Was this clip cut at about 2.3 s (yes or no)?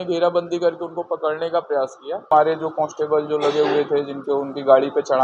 yes